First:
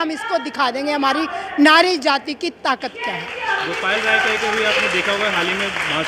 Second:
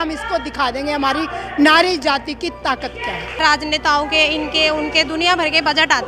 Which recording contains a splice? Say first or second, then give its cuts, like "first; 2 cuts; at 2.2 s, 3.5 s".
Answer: second; 1 cut; at 3.4 s